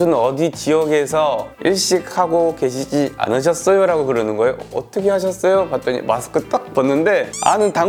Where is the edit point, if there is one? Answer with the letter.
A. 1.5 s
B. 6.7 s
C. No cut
C